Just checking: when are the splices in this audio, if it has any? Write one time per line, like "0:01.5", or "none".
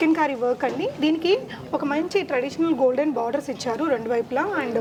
none